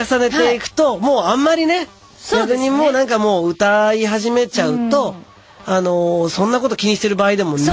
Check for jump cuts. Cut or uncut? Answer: uncut